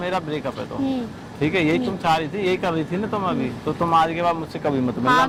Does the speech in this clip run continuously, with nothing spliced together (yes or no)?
yes